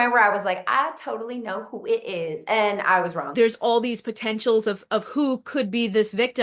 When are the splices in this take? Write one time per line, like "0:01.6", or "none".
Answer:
0:03.2